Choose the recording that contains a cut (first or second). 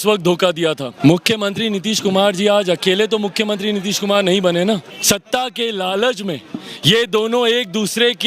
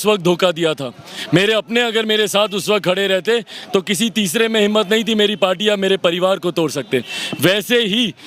first